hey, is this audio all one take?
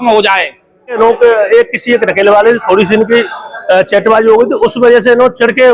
no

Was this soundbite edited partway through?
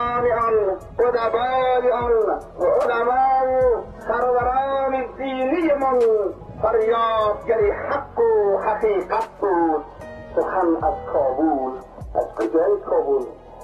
yes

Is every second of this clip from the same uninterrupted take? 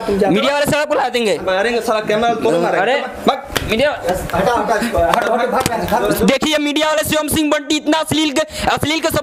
yes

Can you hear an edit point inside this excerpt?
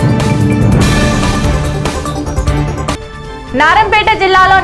no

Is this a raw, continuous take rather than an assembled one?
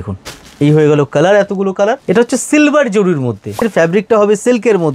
no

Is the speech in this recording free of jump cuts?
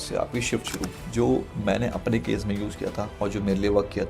no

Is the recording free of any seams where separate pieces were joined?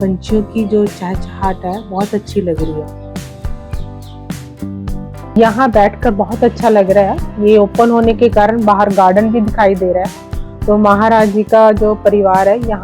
no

